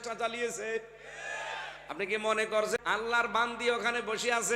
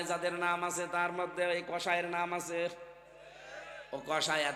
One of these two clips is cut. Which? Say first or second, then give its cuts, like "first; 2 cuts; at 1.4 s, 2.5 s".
first; 1 cut; at 2.8 s